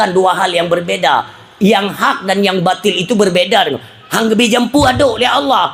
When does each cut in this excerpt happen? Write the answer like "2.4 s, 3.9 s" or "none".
none